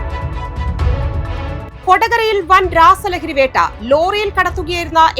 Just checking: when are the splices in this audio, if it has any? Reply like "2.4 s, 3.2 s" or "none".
1.7 s